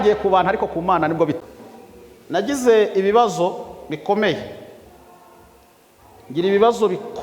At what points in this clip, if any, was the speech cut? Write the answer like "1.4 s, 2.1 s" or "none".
1.4 s